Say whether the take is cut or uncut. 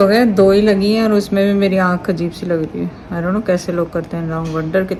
uncut